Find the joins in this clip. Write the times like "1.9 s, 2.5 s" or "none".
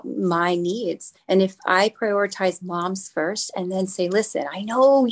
1.1 s

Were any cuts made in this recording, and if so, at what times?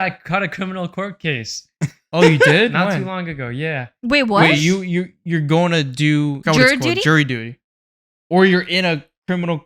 6.4 s

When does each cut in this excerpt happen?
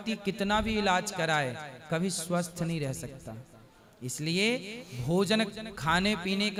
none

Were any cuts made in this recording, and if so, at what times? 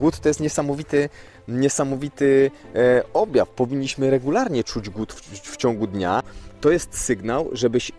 6.4 s

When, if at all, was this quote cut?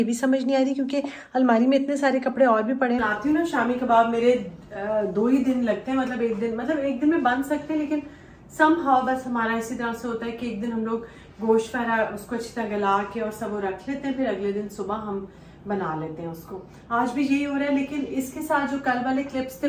3.0 s

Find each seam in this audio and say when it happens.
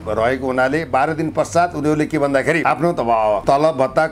2.6 s

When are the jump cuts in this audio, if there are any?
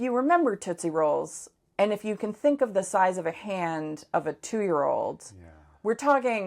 none

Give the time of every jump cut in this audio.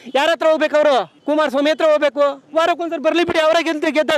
1.1 s

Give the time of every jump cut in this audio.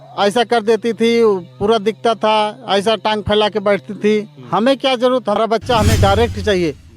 5.4 s

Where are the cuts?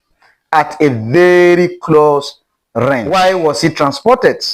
3.0 s

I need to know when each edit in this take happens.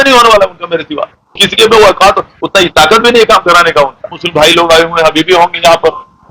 1.5 s, 4.1 s

